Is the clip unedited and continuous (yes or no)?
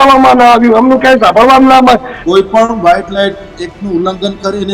no